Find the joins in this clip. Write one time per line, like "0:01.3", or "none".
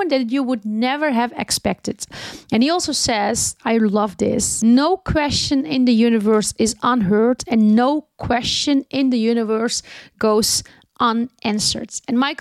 none